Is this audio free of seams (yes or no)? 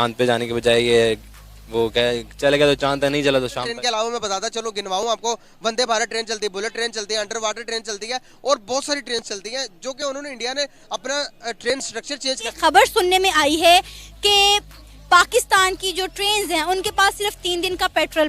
no